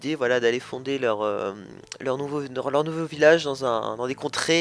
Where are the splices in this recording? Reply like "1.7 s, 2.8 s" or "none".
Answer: 3.5 s

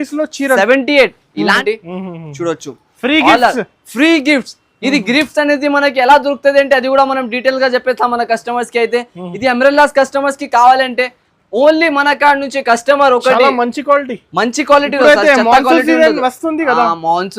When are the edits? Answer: 1.6 s

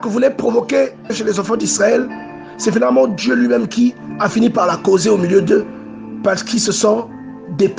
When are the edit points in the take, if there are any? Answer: none

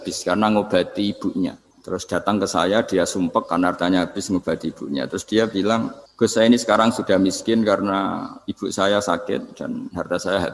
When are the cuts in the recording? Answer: 1.7 s, 6.0 s

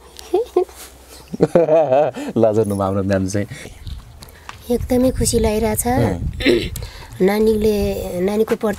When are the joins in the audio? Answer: 3.6 s

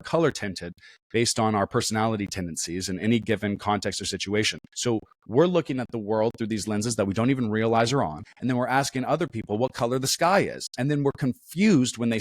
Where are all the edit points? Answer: 4.6 s, 8.3 s

